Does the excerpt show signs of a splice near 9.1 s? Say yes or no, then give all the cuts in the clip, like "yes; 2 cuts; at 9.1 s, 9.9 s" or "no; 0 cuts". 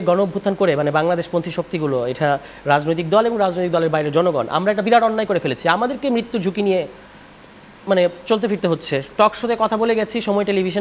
no; 0 cuts